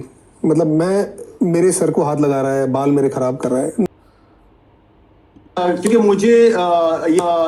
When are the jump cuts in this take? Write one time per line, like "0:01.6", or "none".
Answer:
0:03.9